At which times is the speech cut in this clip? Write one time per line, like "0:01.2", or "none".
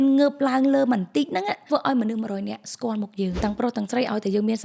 0:01.6
0:03.4